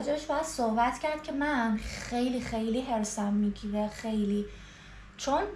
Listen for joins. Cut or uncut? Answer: uncut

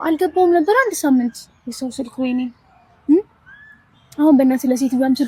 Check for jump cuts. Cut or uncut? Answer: uncut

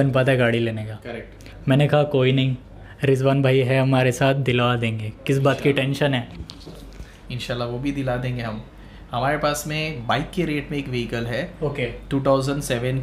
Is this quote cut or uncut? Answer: uncut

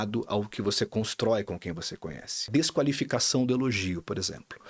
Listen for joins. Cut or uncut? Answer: cut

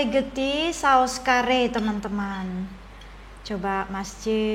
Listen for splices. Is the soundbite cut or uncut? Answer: uncut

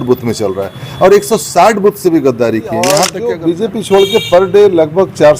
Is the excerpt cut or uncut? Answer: cut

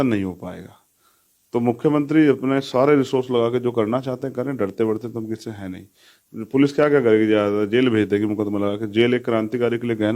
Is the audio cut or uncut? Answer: uncut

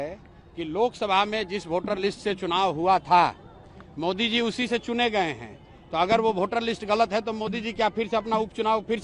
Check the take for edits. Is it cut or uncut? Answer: uncut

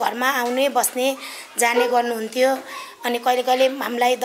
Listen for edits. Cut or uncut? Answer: uncut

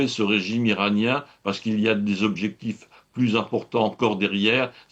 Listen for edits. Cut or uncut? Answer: uncut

